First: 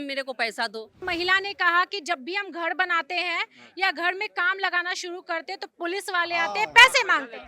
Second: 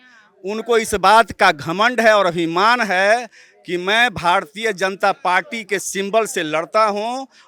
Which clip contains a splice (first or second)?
first